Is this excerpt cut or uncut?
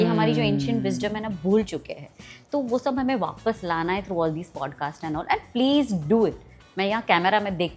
uncut